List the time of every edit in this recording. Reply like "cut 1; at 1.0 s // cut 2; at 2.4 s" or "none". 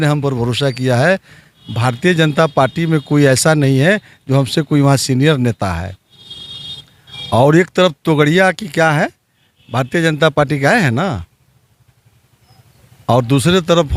none